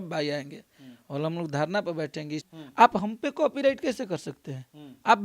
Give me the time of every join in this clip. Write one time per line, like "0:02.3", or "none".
0:02.3